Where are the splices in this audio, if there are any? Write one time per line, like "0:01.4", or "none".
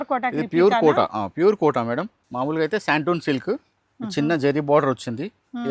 0:02.2